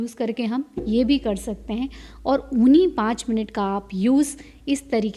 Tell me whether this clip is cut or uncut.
uncut